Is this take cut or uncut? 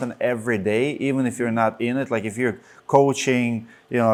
uncut